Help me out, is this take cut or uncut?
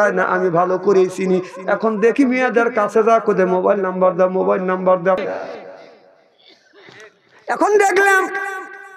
cut